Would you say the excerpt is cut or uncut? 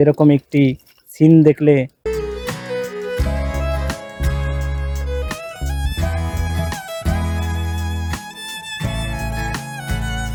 uncut